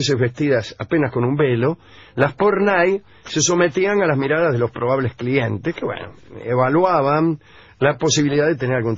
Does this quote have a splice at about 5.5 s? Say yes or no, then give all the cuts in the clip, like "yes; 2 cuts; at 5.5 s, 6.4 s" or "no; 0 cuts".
no; 1 cut; at 7.0 s